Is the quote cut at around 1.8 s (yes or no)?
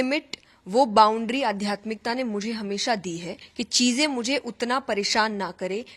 no